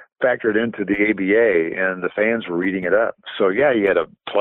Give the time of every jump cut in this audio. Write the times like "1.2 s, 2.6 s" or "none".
none